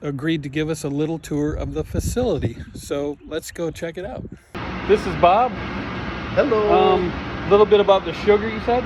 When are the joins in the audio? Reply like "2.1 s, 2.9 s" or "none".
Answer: none